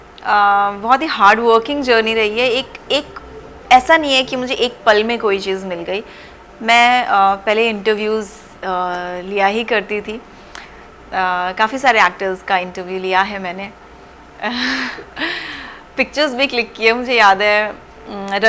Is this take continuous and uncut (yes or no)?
yes